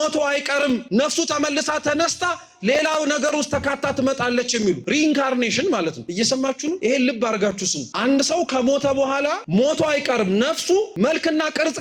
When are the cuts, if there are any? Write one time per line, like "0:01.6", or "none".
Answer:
0:00.8
0:04.8
0:06.3
0:07.8
0:09.4
0:10.9